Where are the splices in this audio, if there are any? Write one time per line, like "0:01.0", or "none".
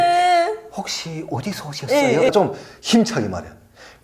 0:02.3